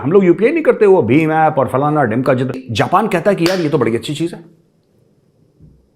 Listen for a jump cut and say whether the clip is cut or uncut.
cut